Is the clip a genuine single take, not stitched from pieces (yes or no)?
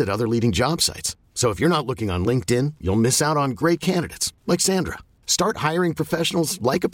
yes